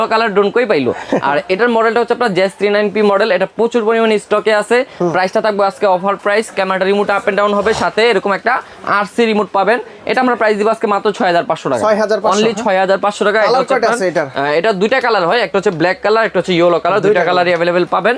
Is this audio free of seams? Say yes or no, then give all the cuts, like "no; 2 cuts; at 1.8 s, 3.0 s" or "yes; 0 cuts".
yes; 0 cuts